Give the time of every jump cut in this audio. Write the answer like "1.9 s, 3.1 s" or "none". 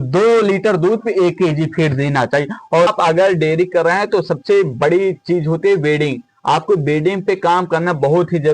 2.9 s